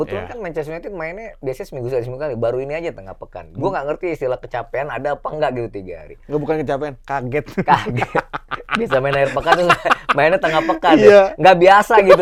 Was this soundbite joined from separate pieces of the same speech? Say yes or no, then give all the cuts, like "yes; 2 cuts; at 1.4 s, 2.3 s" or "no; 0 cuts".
no; 0 cuts